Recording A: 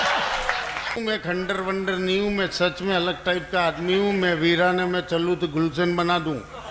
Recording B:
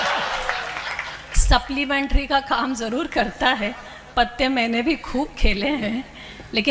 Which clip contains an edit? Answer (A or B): A